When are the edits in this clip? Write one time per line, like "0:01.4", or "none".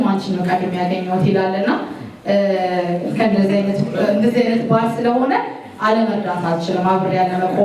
none